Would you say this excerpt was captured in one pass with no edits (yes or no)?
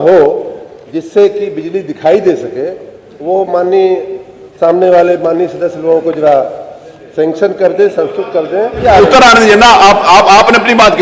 no